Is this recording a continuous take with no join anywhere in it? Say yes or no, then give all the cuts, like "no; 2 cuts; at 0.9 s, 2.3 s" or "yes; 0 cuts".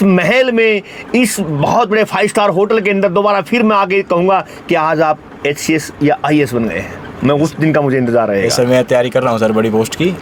yes; 0 cuts